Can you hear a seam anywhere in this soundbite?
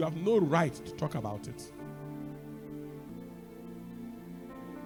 no; 0 cuts

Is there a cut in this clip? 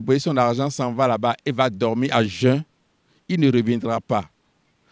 no; 0 cuts

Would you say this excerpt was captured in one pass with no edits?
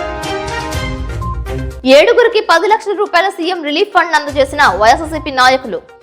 yes; 0 cuts

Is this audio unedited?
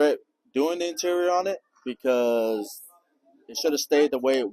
yes; 0 cuts

